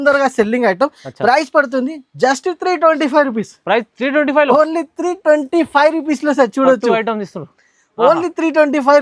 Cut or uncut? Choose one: uncut